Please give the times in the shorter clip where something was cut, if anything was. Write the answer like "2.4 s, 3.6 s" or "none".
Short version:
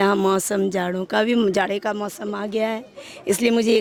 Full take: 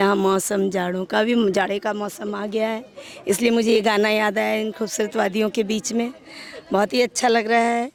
none